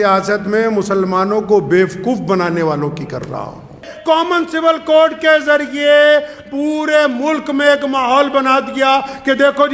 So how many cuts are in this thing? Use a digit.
1